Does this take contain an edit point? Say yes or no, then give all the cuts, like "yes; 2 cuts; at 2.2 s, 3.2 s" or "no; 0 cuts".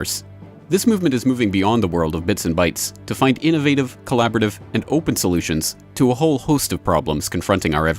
yes; 1 cut; at 2.4 s